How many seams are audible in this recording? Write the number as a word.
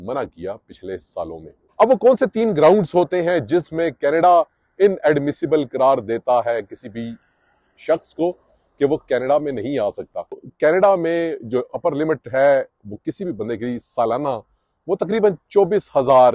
two